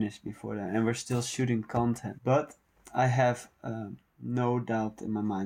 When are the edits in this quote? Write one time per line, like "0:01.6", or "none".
0:02.1

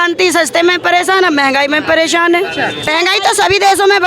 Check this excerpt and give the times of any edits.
0:02.9

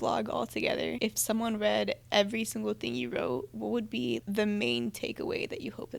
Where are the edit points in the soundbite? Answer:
0:00.9
0:04.2

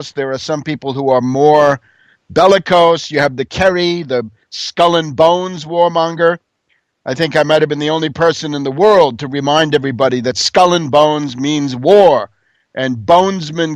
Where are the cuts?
none

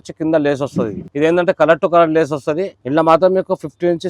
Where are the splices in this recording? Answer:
0:01.0
0:02.7

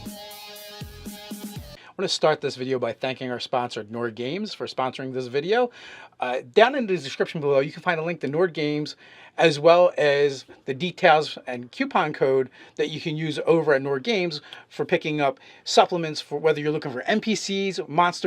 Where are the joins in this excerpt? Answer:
0:01.7
0:07.7

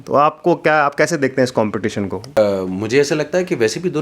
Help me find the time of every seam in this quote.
0:02.4

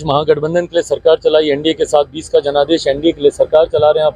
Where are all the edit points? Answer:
none

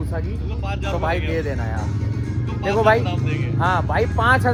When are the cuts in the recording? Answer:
none

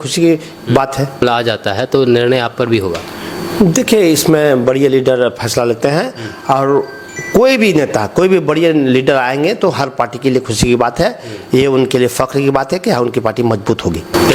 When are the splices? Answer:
none

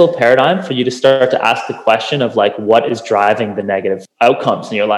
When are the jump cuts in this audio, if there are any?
0:04.1

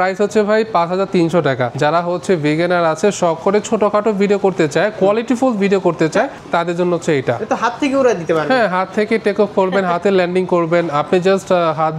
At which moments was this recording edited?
0:01.7
0:06.4

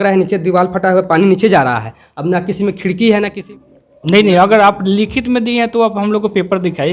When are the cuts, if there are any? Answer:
0:03.4

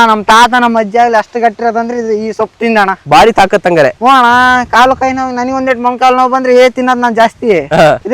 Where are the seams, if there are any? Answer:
0:03.0

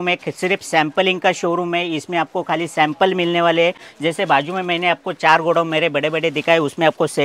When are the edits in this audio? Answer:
none

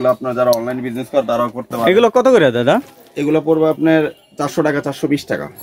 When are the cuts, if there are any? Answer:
none

